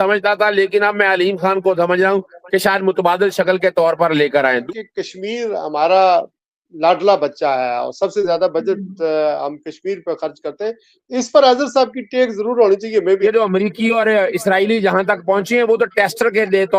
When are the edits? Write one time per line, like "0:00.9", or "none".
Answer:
0:04.6
0:13.2